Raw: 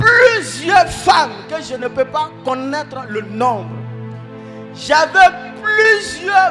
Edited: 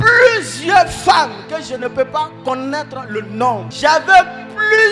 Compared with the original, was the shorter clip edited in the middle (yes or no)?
yes